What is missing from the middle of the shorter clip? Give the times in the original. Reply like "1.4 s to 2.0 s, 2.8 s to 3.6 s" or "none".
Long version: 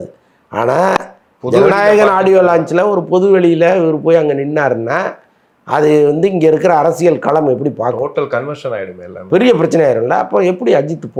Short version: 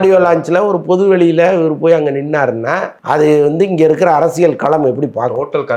5.2 s to 5.6 s